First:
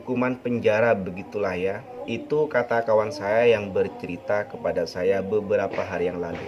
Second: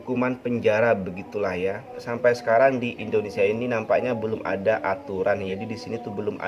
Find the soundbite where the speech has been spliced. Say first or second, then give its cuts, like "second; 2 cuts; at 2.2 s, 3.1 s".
second; 2 cuts; at 1.9 s, 5.5 s